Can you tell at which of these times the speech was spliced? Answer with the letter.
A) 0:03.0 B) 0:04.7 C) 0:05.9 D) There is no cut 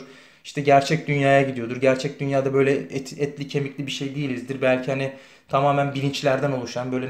D